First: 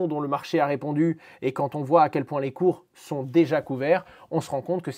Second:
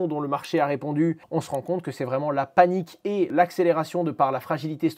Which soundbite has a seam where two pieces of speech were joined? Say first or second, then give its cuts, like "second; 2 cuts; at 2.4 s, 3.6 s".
second; 2 cuts; at 1.2 s, 3.3 s